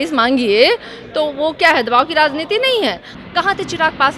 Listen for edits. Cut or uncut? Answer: cut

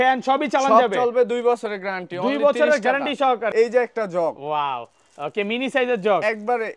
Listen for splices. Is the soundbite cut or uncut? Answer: cut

